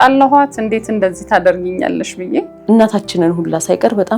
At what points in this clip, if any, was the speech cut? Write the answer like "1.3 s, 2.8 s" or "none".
2.5 s